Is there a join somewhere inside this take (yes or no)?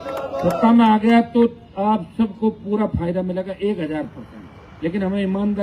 no